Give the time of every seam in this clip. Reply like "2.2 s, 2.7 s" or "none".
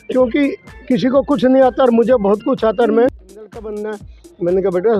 3.5 s

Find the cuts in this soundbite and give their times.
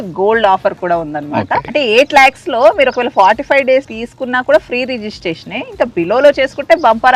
1.6 s, 4.0 s

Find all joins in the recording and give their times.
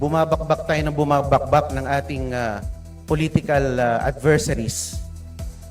4.7 s

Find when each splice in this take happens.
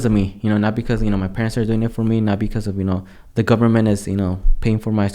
3.2 s

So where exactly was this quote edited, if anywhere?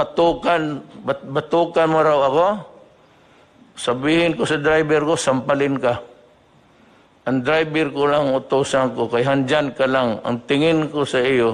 none

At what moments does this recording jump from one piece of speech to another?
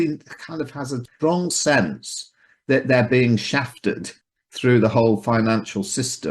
1.0 s, 4.1 s

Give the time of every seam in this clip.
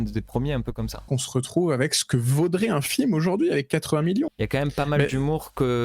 1.1 s, 4.3 s

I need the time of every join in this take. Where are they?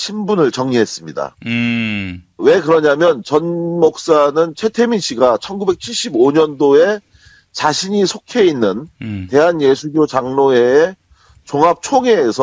10.0 s

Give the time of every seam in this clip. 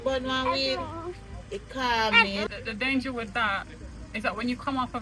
2.4 s

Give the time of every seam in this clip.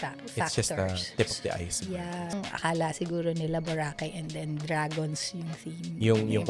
2.4 s

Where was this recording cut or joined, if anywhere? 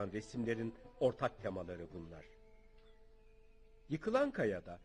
3.2 s

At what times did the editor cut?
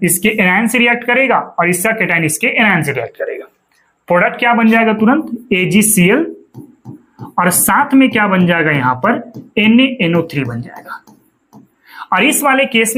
none

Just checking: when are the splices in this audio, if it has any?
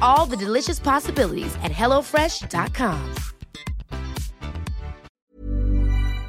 5.1 s

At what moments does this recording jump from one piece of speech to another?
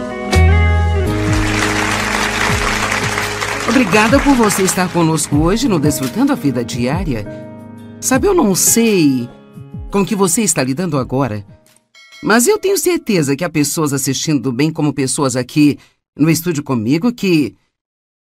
none

